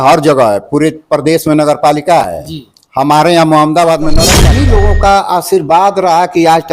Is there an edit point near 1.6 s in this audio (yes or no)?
no